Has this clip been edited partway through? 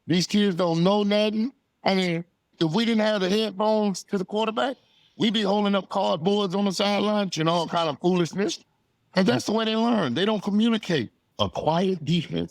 yes; 3 cuts; at 2.5 s, 7.3 s, 11.2 s

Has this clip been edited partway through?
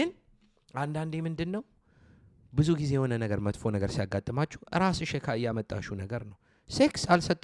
no; 0 cuts

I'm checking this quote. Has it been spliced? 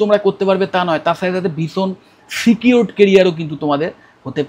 no; 0 cuts

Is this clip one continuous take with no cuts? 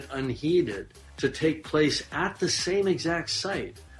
no; 1 cut; at 1.2 s

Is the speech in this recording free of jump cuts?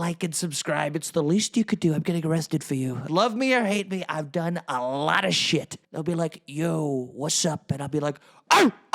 no; 2 cuts; at 3.0 s, 5.8 s

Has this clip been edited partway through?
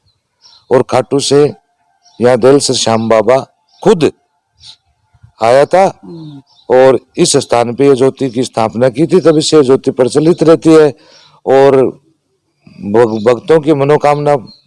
no; 0 cuts

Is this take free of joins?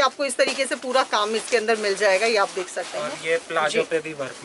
yes; 0 cuts

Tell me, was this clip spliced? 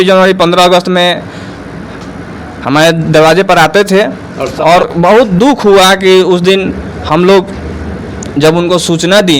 yes; 1 cut; at 4.8 s

